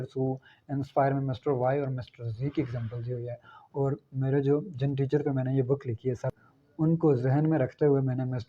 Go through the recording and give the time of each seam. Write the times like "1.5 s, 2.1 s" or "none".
6.3 s